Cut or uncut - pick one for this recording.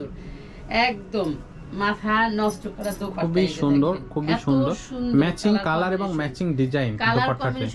uncut